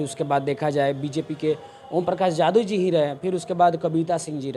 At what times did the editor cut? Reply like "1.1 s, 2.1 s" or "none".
none